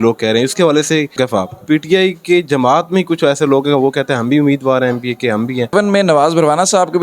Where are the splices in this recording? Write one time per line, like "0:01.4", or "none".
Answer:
0:01.2
0:05.7